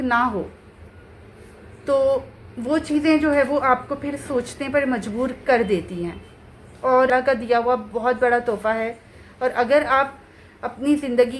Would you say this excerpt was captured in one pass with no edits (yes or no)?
no